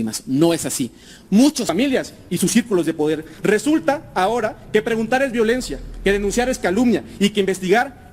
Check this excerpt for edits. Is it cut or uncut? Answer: cut